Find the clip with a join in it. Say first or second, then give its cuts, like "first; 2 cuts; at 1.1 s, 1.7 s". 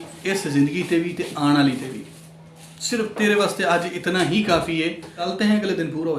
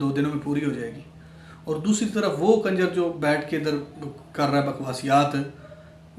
first; 1 cut; at 5.2 s